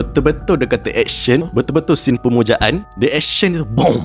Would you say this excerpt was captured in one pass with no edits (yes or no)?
no